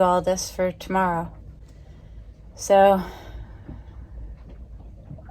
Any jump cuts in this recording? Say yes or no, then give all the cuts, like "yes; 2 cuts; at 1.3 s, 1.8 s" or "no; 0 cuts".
no; 0 cuts